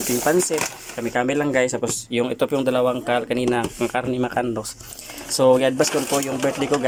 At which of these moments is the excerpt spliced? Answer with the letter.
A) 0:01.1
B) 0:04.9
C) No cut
C